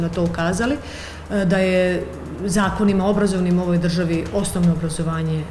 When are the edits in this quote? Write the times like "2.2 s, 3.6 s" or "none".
none